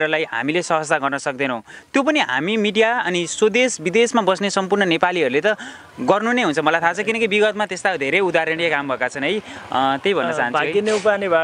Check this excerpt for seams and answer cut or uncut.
uncut